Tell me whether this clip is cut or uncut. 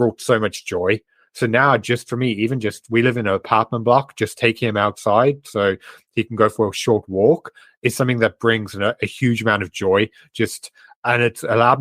uncut